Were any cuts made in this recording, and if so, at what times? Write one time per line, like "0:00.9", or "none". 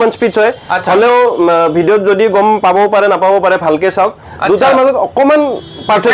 none